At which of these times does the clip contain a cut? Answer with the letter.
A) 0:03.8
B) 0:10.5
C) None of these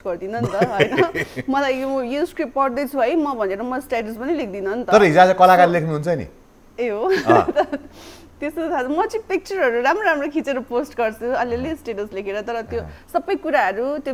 C